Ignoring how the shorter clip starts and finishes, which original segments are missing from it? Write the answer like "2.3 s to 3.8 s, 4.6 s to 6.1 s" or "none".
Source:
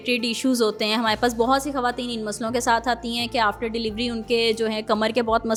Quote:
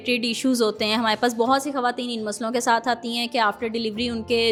none